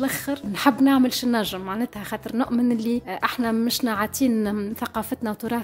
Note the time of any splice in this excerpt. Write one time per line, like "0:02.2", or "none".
none